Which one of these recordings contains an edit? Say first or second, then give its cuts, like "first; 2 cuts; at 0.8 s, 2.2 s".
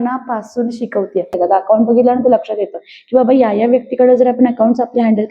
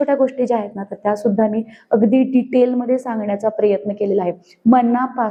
first; 1 cut; at 1.3 s